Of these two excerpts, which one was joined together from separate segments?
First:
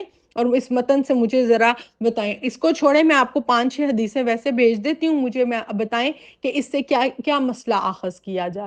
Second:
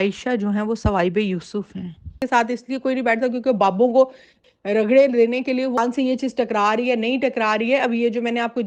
second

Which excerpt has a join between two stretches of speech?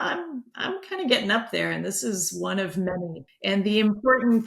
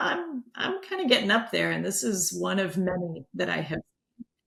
first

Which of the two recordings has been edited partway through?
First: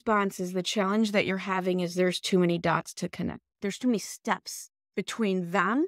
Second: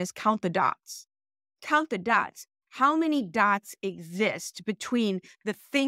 first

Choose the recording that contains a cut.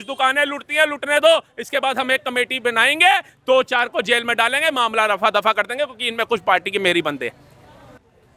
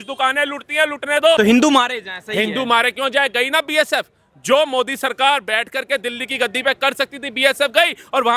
second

